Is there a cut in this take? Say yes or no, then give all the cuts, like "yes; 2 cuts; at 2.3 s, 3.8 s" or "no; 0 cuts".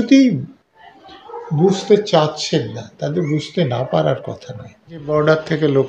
yes; 1 cut; at 5.0 s